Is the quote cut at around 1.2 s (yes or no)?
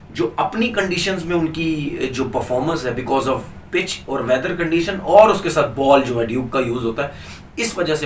no